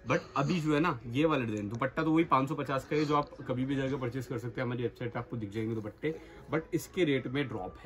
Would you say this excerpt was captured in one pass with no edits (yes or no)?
yes